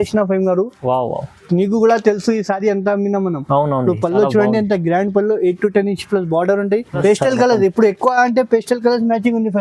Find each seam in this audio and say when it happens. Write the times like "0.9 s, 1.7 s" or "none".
7.0 s